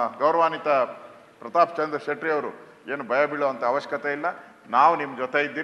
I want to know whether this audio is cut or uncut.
uncut